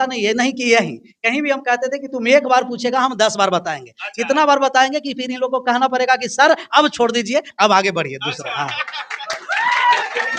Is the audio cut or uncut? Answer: uncut